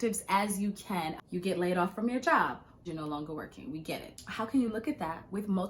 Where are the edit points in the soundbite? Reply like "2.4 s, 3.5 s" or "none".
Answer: 1.2 s, 2.9 s, 4.4 s